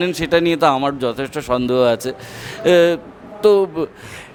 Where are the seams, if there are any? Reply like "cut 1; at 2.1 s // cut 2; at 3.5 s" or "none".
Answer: none

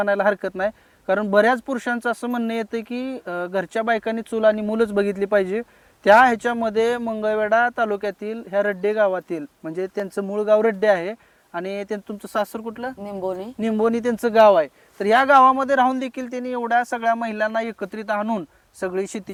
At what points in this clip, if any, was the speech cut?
none

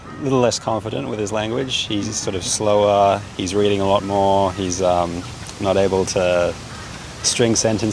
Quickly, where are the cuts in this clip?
none

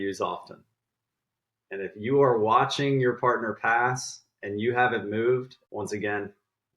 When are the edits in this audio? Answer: cut 1; at 5.6 s

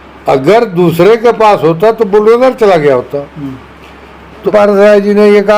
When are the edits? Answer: cut 1; at 4.5 s

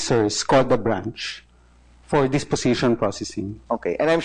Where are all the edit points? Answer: none

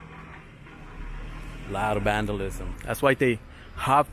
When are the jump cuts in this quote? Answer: cut 1; at 2.7 s

